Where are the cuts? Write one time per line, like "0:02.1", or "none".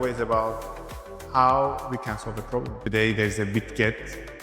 0:02.8

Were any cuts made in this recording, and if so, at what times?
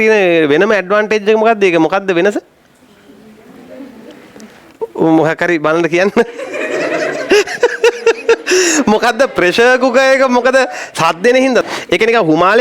0:11.6

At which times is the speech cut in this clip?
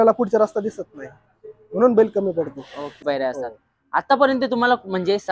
0:03.0

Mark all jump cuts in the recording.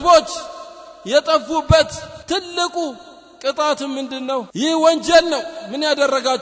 0:02.1
0:04.5

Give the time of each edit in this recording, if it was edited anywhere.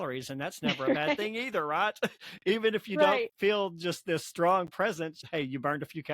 0:05.2

